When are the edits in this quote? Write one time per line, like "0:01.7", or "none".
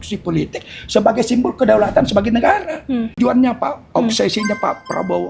0:03.2